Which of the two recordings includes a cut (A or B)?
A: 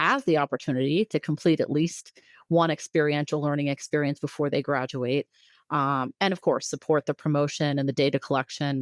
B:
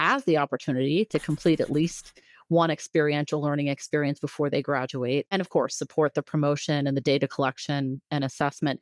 B